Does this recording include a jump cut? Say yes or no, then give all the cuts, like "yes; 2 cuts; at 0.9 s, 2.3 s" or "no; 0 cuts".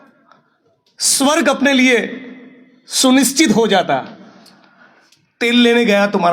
no; 0 cuts